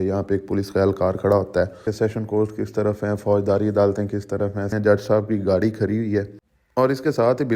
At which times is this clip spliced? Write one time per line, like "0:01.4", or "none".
0:01.9
0:04.7